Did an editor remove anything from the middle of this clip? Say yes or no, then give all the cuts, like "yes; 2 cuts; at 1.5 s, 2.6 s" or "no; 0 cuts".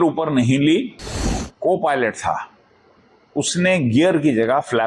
yes; 1 cut; at 1.4 s